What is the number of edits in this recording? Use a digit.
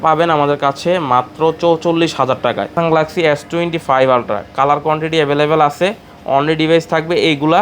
1